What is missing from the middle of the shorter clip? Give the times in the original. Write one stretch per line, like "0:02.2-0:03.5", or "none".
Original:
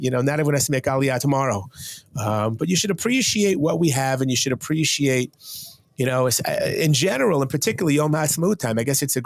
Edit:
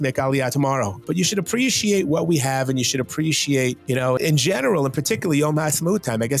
0:01.7-0:02.6
0:05.7-0:06.7